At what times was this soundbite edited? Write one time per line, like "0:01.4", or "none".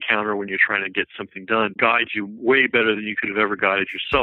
0:01.7

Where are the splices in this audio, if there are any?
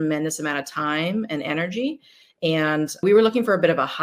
0:03.0

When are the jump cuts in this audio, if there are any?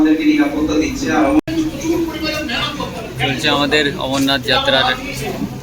0:01.4

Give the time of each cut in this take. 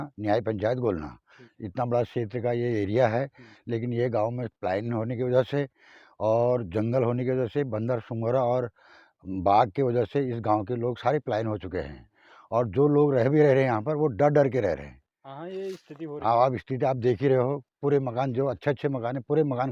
none

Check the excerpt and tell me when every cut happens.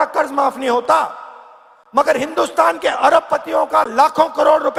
none

